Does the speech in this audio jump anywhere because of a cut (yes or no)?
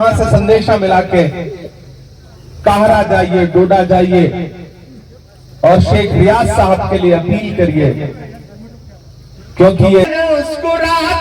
yes